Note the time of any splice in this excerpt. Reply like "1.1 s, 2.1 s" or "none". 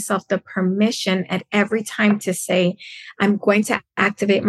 none